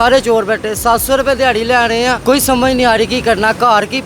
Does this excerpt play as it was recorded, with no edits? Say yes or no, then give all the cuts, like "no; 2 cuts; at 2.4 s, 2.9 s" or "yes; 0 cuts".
no; 1 cut; at 2.2 s